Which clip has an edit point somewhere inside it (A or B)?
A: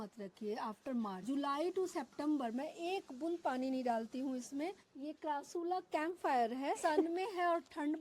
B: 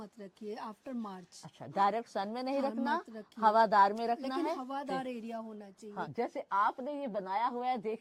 A